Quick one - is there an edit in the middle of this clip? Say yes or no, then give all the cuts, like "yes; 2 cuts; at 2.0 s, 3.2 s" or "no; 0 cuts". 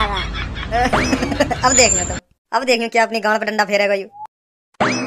yes; 1 cut; at 4.1 s